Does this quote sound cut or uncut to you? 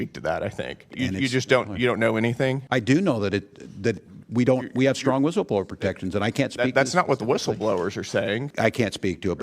cut